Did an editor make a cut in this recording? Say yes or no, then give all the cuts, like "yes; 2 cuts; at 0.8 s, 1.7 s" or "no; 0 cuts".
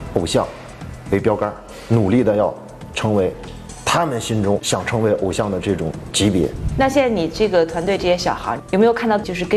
yes; 2 cuts; at 4.6 s, 6.6 s